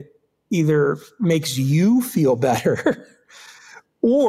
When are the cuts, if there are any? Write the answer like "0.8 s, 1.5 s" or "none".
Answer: none